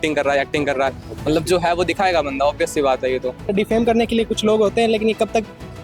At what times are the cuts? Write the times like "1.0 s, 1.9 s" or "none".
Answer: 3.5 s